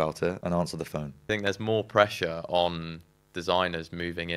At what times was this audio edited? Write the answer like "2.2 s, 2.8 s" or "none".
1.0 s